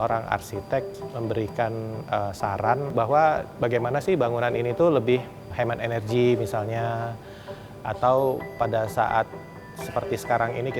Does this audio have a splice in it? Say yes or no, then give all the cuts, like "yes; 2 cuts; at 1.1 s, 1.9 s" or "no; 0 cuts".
yes; 3 cuts; at 0.9 s, 2.9 s, 5.5 s